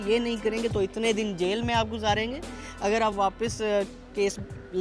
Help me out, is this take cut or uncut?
uncut